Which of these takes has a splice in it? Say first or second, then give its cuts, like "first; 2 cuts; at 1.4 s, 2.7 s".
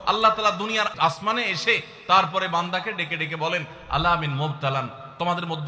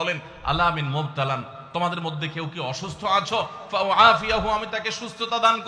first; 1 cut; at 0.9 s